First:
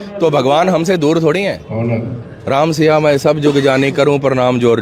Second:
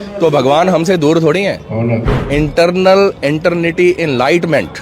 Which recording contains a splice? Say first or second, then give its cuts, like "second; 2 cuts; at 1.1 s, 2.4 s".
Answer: second; 1 cut; at 2.1 s